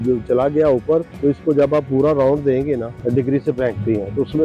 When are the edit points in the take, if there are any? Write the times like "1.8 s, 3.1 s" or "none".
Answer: 1.1 s, 2.9 s